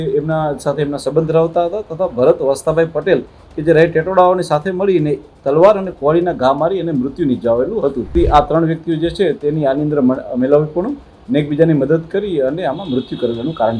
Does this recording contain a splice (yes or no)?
yes